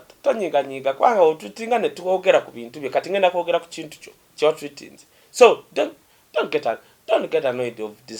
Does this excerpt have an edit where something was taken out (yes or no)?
no